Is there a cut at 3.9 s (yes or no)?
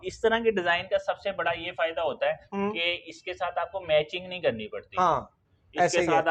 no